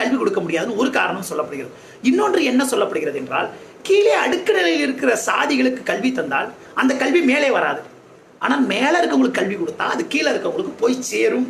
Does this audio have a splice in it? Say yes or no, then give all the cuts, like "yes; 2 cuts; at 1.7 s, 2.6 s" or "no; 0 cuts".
no; 0 cuts